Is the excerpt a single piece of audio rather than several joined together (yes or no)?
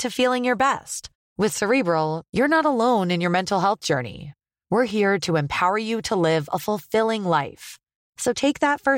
yes